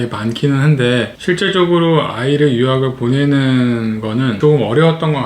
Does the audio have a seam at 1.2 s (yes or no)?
no